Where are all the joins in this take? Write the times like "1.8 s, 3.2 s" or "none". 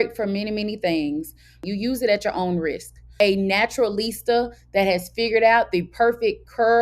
1.6 s, 3.1 s